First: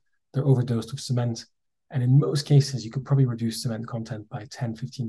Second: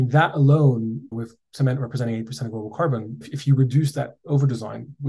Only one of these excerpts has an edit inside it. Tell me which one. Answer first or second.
second